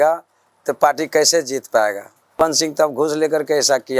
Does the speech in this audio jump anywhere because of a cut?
no; 0 cuts

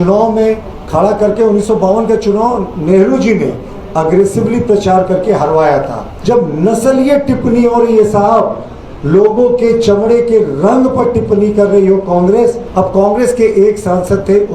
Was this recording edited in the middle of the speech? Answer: yes; 2 cuts; at 6.1 s, 12.6 s

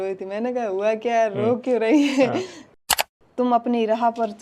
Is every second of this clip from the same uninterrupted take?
no; 1 cut; at 2.8 s

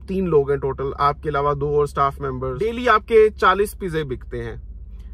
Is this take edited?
yes; 1 cut; at 2.7 s

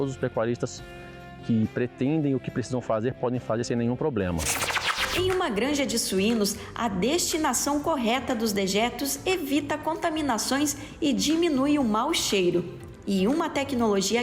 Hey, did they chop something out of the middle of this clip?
yes; 1 cut; at 5.0 s

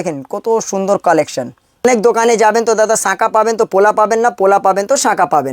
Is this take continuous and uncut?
no; 1 cut; at 1.8 s

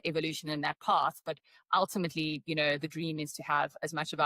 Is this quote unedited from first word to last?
yes; 0 cuts

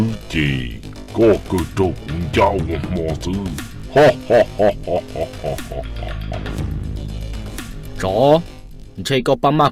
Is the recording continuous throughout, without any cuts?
yes; 0 cuts

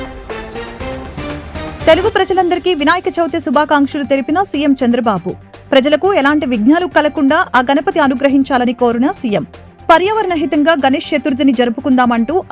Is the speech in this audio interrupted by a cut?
yes; 1 cut; at 1.7 s

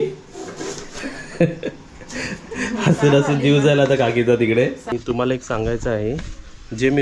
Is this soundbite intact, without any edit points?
no; 1 cut; at 4.9 s

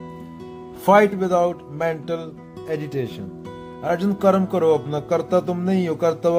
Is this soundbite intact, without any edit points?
yes; 0 cuts

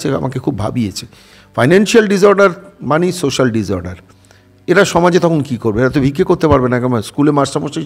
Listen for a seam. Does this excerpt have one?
no; 0 cuts

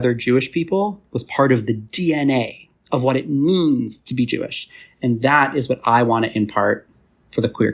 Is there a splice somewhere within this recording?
no; 0 cuts

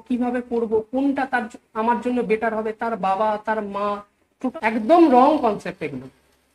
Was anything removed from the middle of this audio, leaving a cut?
yes; 1 cut; at 4.4 s

